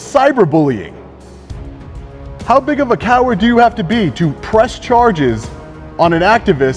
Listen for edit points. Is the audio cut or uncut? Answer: uncut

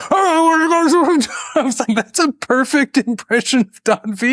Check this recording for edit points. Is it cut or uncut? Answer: uncut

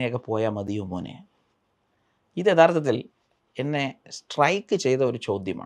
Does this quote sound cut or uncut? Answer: uncut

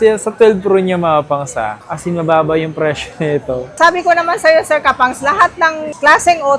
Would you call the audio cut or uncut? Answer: cut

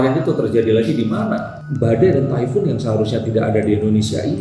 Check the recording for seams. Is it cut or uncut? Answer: cut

